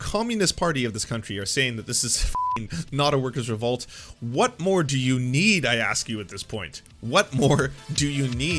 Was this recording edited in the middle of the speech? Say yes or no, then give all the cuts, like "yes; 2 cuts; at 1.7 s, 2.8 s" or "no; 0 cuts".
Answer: no; 0 cuts